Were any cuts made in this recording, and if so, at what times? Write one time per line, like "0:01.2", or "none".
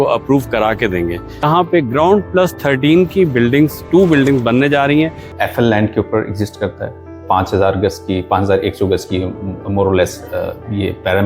0:01.4
0:05.3